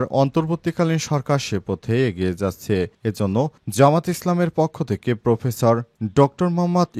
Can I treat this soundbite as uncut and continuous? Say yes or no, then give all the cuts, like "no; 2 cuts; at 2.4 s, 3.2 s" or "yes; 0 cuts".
yes; 0 cuts